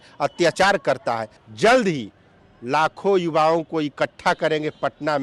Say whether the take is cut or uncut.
cut